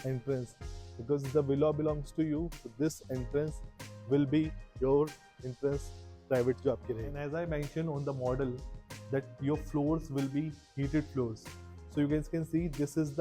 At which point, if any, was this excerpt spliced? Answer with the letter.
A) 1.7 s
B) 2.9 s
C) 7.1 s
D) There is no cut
C